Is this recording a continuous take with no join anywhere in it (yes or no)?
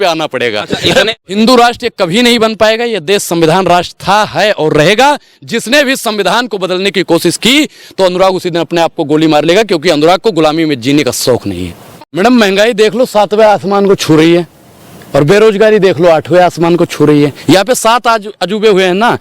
no